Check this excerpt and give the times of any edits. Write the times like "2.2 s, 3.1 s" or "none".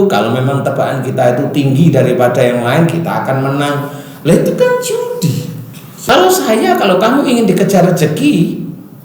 6.1 s